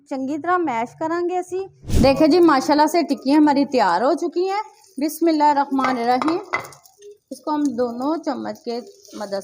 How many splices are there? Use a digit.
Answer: 1